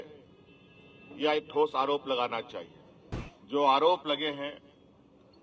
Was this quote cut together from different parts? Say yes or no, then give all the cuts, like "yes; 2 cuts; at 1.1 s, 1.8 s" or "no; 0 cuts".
yes; 1 cut; at 3.3 s